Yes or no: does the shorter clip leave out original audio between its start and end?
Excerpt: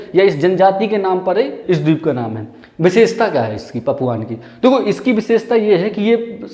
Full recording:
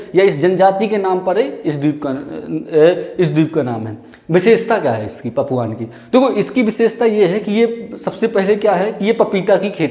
yes